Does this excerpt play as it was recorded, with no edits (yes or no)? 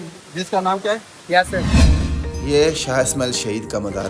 no